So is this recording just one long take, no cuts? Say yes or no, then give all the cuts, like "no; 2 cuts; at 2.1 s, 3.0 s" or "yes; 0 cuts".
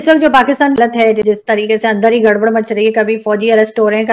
no; 1 cut; at 1.2 s